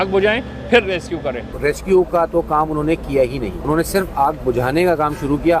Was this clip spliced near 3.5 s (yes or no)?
yes